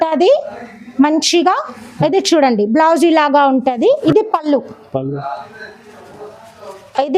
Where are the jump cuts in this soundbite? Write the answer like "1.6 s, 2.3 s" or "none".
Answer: 4.0 s